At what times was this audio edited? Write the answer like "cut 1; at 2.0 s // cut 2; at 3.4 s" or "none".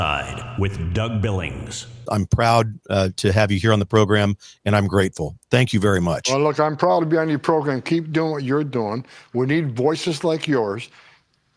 cut 1; at 2.0 s

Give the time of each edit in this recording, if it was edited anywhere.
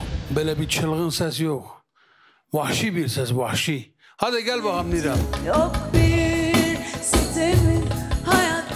cut 1; at 5.2 s

